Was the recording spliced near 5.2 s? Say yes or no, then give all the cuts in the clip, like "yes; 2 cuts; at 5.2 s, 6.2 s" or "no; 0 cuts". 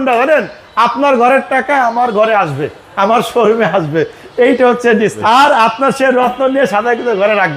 yes; 1 cut; at 5.2 s